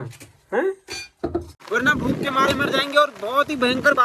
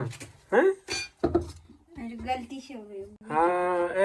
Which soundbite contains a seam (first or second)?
first